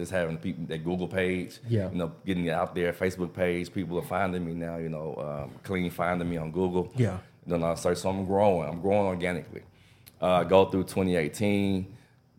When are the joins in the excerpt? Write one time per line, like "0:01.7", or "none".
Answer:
none